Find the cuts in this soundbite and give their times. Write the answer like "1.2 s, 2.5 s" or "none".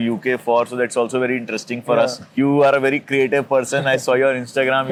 none